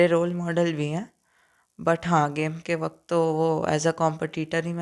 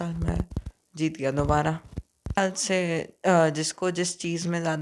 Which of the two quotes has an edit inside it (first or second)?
second